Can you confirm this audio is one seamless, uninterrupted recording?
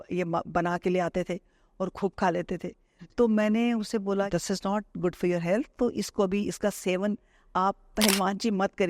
no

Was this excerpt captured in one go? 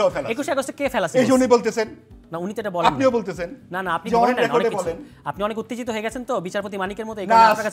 yes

